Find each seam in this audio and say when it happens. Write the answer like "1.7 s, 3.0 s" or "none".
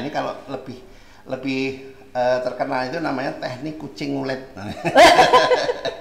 none